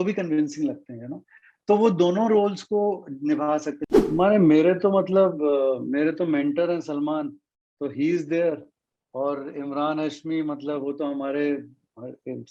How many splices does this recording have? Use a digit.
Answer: 1